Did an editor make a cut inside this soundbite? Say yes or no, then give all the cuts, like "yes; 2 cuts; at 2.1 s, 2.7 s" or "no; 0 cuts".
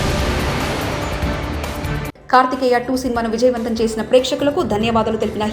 yes; 1 cut; at 2.0 s